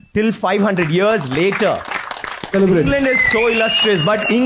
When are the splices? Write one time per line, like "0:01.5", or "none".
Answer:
0:02.5